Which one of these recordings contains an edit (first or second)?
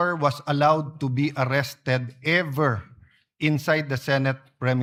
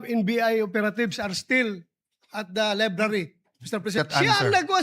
second